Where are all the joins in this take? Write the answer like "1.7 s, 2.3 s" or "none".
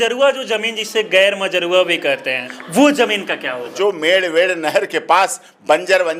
2.5 s, 3.7 s